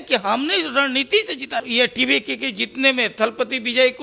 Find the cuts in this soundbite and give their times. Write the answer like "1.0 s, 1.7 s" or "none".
1.7 s